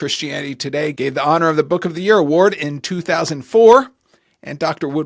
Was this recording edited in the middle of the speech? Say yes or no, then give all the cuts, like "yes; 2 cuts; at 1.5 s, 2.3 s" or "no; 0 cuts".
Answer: yes; 1 cut; at 0.9 s